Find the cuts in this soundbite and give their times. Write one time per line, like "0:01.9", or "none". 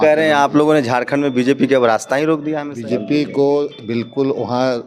0:02.7